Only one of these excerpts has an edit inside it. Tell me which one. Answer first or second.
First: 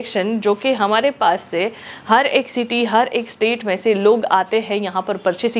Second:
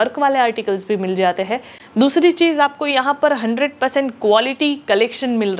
second